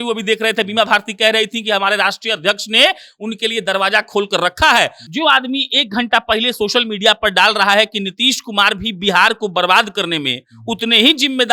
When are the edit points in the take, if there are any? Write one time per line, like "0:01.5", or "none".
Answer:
0:05.0